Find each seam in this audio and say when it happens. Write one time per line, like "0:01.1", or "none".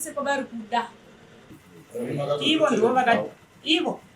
0:01.4